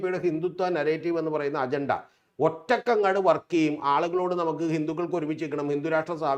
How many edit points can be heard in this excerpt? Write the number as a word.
zero